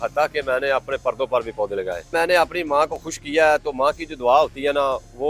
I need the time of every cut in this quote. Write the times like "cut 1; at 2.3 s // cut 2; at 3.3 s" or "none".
cut 1; at 2.1 s